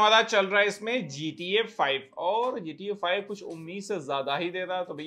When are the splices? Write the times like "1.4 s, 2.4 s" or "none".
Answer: none